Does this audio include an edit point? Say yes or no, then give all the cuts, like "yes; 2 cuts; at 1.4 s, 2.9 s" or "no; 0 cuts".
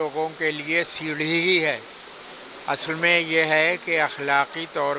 no; 0 cuts